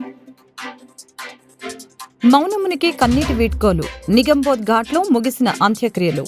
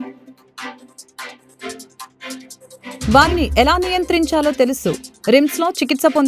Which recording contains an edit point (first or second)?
second